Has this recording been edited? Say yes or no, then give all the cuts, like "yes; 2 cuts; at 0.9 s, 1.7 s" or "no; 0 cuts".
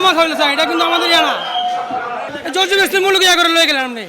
yes; 1 cut; at 2.3 s